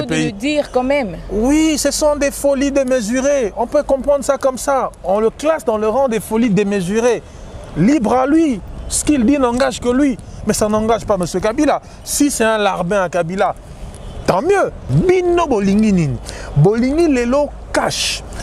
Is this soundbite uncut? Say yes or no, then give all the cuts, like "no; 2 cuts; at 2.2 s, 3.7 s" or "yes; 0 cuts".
no; 1 cut; at 14.9 s